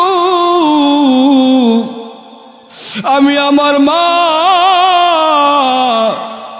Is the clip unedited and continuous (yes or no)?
yes